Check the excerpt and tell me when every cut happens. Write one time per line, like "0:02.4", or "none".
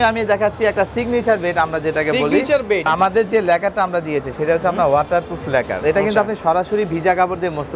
0:02.9
0:05.7